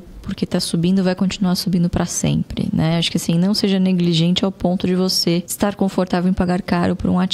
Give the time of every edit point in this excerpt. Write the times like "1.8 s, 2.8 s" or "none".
5.5 s